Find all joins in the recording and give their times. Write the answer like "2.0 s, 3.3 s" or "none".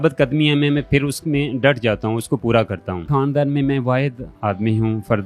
3.1 s

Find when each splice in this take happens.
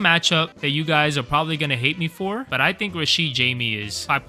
none

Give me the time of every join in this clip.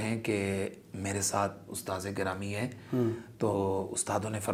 none

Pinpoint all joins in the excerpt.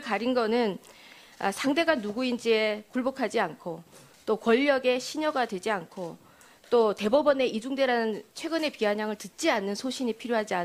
5.0 s

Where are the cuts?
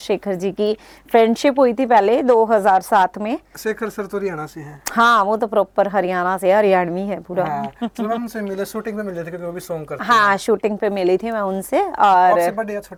none

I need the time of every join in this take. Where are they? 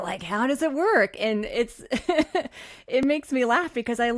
none

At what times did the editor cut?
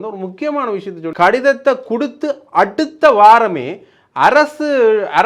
1.0 s

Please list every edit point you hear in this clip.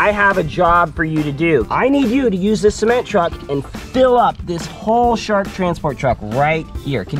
1.7 s

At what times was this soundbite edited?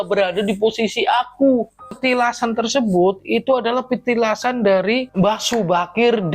1.9 s

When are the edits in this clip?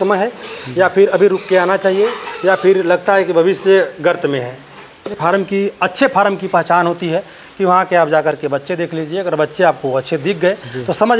5.1 s

